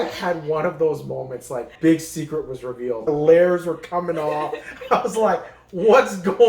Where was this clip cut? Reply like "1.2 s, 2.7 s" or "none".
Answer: 1.7 s, 3.1 s